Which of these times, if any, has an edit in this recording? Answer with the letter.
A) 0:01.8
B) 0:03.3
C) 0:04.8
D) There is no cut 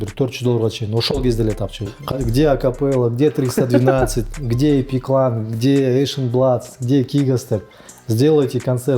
A